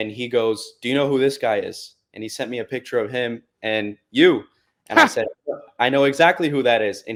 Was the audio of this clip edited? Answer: no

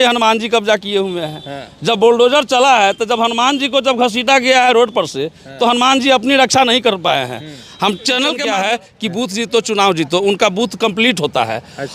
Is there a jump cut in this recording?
yes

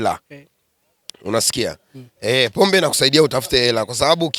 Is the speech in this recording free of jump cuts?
yes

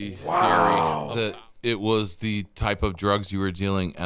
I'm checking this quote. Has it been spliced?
yes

